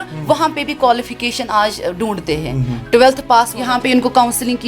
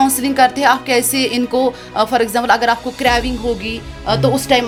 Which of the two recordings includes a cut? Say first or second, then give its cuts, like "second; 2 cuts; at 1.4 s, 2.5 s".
first; 1 cut; at 3.6 s